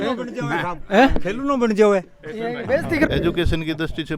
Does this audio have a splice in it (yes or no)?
yes